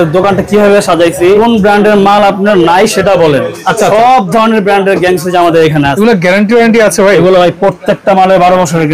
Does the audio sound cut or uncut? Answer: cut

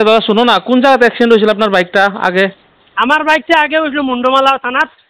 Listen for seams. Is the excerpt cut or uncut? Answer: uncut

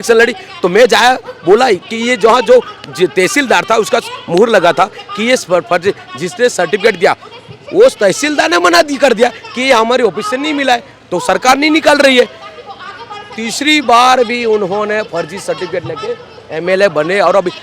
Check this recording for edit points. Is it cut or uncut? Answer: uncut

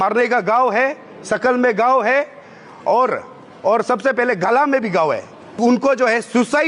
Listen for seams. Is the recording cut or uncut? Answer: cut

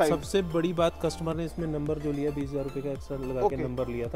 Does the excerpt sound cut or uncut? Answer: uncut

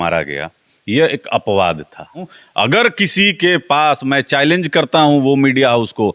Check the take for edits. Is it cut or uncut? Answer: cut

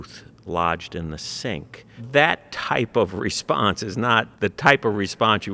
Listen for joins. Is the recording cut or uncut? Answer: cut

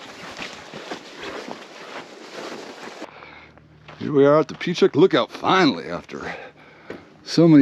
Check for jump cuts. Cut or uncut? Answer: cut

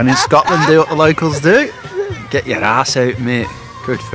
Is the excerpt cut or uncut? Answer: uncut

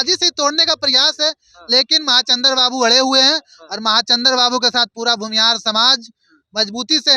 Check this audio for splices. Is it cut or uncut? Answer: uncut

